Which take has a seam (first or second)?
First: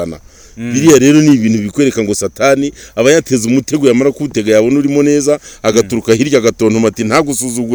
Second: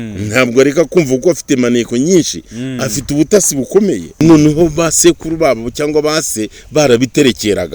second